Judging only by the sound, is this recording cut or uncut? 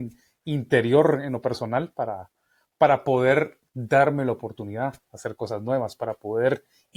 uncut